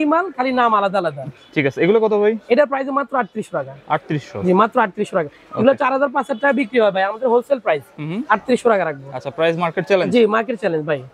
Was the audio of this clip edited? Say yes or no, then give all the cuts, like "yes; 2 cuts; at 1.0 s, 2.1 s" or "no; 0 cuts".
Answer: no; 0 cuts